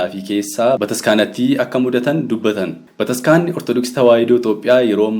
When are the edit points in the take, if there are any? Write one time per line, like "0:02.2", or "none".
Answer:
0:00.8
0:02.8